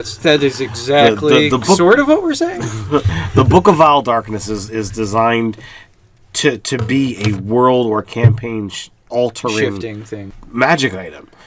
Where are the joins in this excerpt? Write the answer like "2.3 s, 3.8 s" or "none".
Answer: 7.1 s